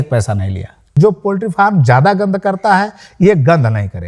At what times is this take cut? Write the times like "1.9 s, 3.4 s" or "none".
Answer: 1.0 s